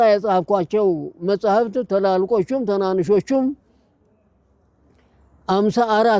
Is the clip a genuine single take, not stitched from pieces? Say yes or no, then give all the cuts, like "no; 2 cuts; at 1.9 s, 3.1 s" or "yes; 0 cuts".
yes; 0 cuts